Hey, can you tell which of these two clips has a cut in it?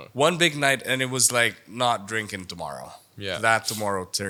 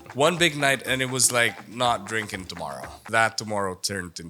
second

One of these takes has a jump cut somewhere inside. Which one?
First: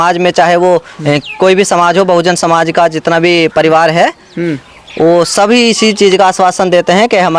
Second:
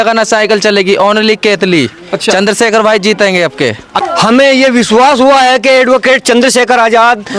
second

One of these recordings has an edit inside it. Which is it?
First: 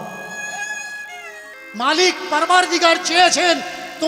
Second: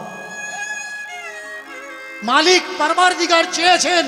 first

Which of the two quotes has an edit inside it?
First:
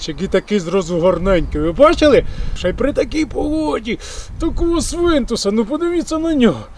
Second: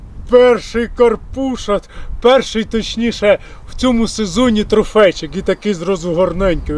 first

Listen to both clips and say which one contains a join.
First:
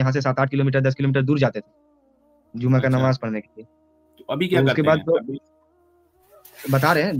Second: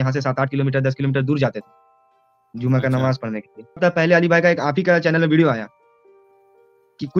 second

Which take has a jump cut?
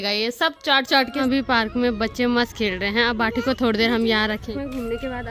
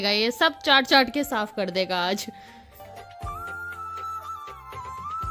first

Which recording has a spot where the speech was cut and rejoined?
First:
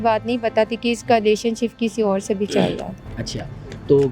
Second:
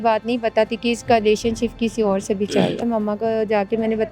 second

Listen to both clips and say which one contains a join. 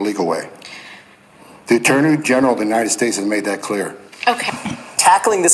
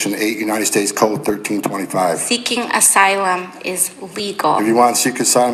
first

